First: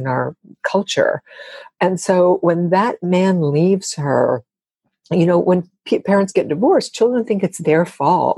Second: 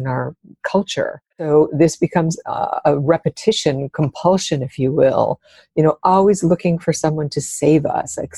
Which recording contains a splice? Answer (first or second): second